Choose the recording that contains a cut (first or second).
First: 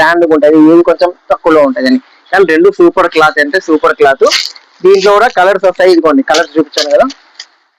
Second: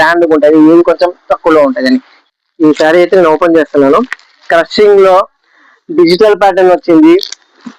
second